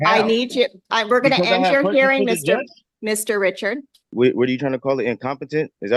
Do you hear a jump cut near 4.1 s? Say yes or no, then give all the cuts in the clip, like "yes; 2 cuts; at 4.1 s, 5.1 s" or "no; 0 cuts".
yes; 1 cut; at 4.1 s